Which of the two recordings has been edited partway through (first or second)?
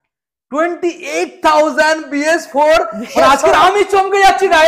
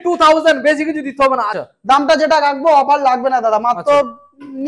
second